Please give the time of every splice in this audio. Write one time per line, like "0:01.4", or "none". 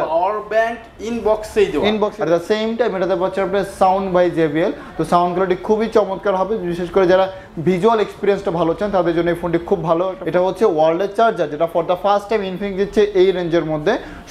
0:02.2
0:10.2